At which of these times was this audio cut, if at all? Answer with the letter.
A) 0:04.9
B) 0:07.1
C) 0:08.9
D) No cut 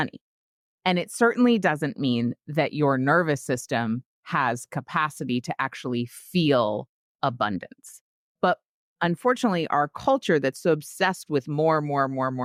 D